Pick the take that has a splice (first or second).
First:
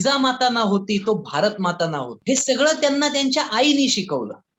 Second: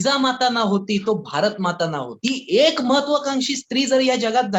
second